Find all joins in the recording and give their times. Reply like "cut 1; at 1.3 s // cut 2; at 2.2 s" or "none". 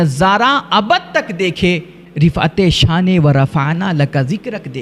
none